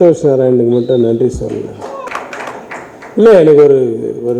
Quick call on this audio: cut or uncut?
cut